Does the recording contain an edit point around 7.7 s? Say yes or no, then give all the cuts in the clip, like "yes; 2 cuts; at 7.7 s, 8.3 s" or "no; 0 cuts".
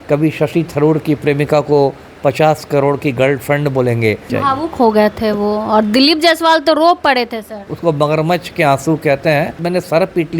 yes; 3 cuts; at 4.2 s, 7.7 s, 9.6 s